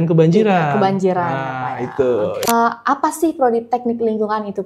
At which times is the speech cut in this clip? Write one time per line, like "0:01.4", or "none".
0:02.5